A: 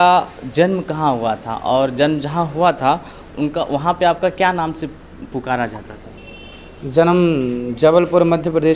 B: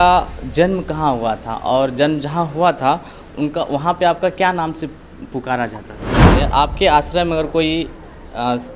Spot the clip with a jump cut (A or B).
B